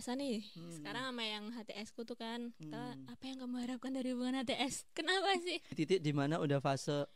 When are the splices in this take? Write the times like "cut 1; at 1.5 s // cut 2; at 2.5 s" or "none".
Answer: cut 1; at 5.8 s